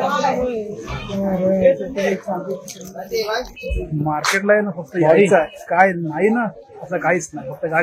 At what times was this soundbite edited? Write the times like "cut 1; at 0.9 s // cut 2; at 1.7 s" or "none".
none